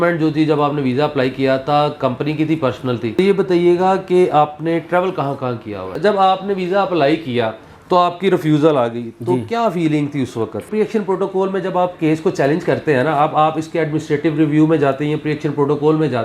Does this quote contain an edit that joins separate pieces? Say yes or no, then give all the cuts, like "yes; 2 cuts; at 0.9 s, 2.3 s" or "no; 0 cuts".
yes; 3 cuts; at 3.2 s, 6.0 s, 10.7 s